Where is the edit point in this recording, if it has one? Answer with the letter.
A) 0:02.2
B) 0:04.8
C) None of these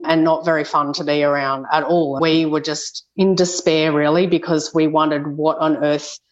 A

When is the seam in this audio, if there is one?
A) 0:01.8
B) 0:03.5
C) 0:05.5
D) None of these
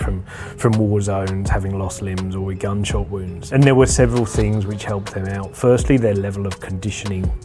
B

